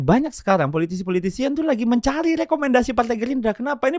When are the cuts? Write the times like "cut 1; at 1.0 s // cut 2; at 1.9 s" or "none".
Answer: none